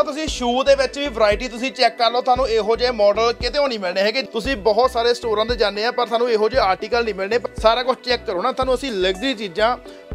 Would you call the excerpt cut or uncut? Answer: cut